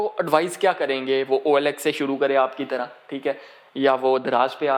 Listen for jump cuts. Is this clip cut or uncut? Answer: uncut